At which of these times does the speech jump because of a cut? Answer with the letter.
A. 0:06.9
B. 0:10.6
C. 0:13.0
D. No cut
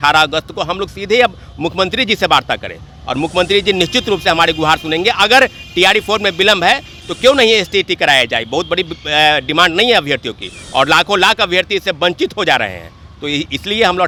D